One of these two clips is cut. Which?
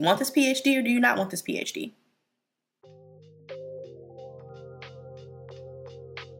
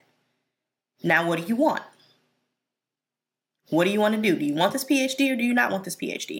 first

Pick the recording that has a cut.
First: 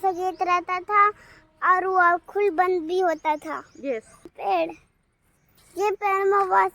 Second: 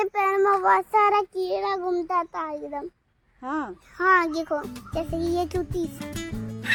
first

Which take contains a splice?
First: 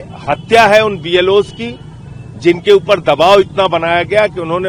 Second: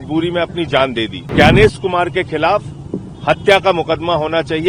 second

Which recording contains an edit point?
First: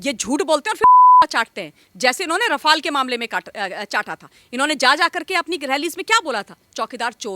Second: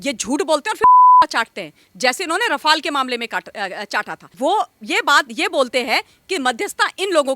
second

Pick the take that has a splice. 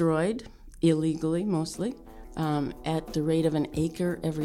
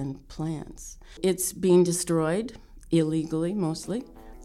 second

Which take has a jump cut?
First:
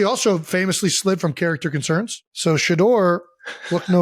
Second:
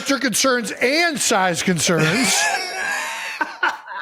first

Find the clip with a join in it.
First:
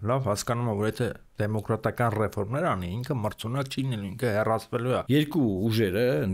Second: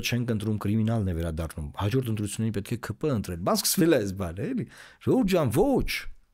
first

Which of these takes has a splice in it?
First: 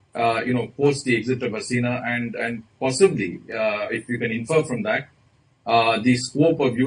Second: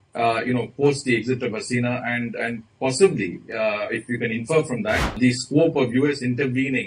second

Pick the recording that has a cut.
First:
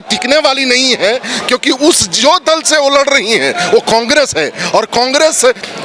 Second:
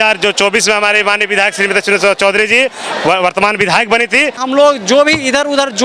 second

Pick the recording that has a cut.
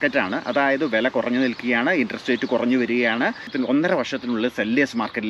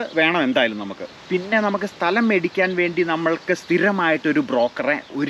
first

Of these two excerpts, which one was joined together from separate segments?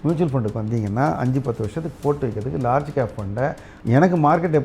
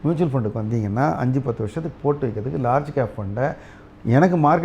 first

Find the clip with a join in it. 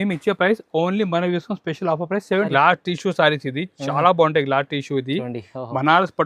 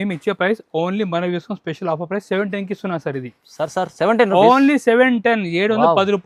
first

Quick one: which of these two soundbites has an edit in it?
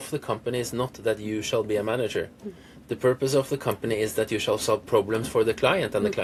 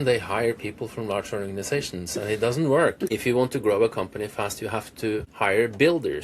second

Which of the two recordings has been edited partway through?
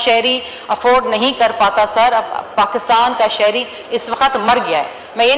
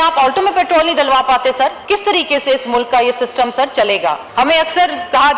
second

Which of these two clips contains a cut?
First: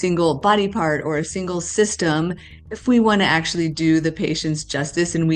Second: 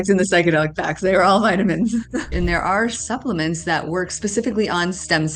second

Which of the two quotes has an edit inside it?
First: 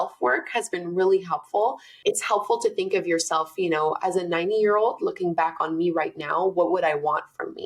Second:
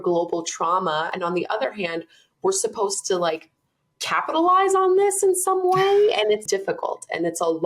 second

